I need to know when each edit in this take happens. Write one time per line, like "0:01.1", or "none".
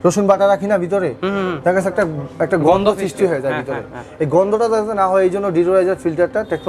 none